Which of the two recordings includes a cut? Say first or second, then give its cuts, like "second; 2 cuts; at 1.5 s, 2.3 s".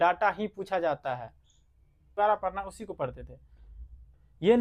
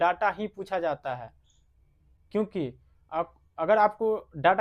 first; 1 cut; at 2.2 s